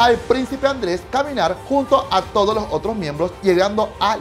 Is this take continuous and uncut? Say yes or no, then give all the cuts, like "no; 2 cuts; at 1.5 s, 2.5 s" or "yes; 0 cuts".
no; 2 cuts; at 1.6 s, 3.4 s